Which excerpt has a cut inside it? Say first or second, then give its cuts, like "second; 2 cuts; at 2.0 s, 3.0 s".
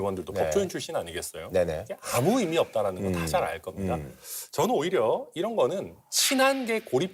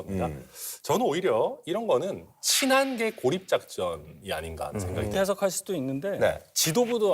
second; 1 cut; at 5.1 s